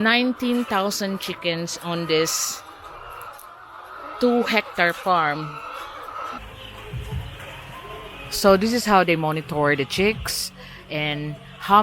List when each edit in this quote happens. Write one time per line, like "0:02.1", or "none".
0:06.4